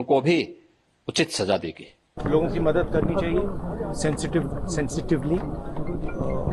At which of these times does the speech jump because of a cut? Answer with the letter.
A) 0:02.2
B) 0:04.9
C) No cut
A